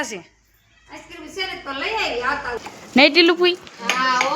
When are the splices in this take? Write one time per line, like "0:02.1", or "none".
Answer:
0:02.6